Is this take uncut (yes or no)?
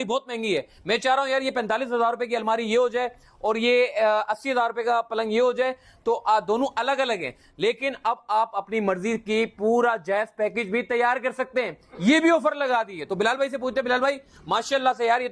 yes